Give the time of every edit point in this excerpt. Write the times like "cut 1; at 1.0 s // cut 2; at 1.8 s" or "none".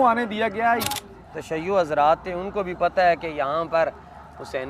cut 1; at 1.1 s

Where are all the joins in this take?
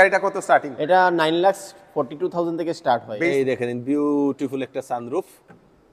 cut 1; at 3.1 s

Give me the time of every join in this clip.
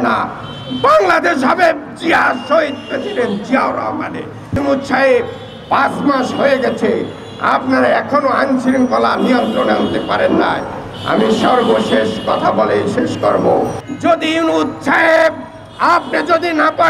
cut 1; at 4.6 s // cut 2; at 13.8 s

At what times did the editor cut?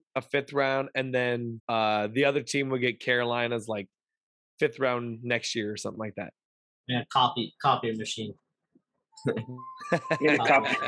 cut 1; at 1.6 s

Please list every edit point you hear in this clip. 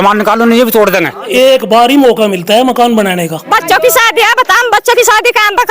cut 1; at 1.3 s // cut 2; at 3.4 s

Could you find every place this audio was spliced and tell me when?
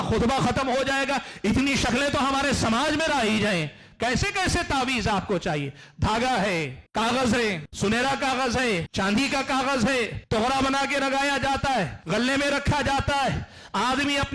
cut 1; at 6.8 s // cut 2; at 7.7 s // cut 3; at 8.9 s // cut 4; at 10.2 s // cut 5; at 12.0 s

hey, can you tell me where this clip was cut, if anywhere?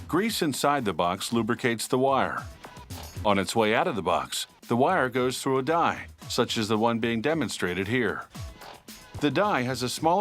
cut 1; at 8.4 s

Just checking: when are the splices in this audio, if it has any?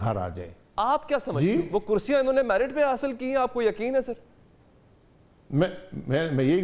cut 1; at 1.4 s

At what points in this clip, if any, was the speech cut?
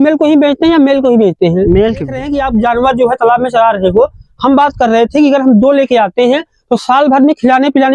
cut 1; at 2.3 s

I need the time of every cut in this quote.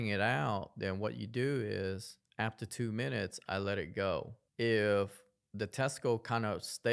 cut 1; at 4.4 s

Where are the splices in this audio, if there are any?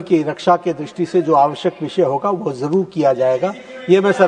none

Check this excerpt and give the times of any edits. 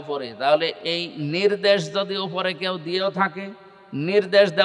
none

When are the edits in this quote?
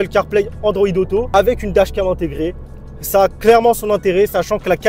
cut 1; at 1.3 s

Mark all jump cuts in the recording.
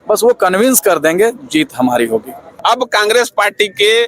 cut 1; at 2.4 s

